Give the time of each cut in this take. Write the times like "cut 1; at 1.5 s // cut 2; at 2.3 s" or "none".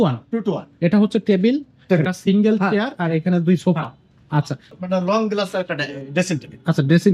cut 1; at 4.7 s